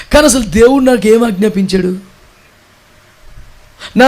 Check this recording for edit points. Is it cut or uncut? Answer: uncut